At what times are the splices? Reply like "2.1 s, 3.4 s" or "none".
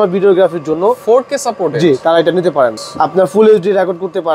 2.8 s